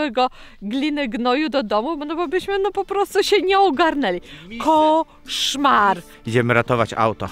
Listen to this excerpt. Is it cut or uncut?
cut